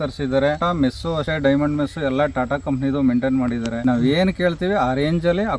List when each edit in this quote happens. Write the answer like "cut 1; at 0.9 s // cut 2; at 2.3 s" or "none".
cut 1; at 1.1 s // cut 2; at 3.7 s

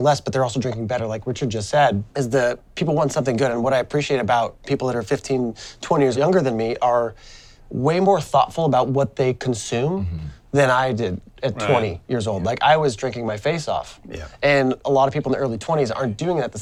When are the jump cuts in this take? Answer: none

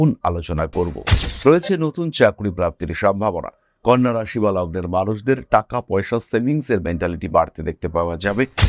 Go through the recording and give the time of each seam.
cut 1; at 1.2 s

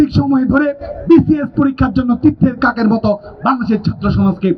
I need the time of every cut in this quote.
none

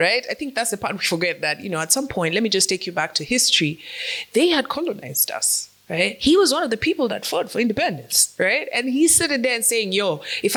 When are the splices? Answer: none

